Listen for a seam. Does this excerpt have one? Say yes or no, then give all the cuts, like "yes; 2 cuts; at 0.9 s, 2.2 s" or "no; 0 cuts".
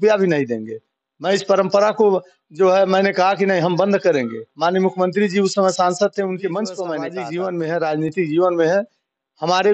yes; 1 cut; at 7.0 s